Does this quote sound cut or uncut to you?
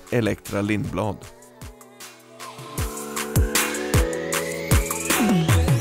cut